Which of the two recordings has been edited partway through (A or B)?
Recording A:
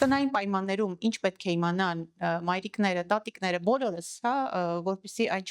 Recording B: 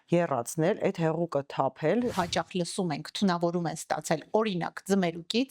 B